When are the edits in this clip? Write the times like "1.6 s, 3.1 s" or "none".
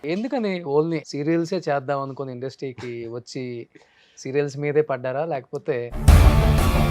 1.1 s, 5.9 s